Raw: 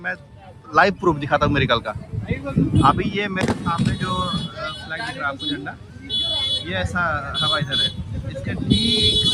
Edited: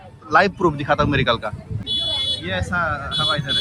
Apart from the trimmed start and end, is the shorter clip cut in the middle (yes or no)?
yes